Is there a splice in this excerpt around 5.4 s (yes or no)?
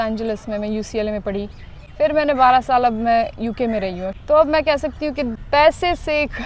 yes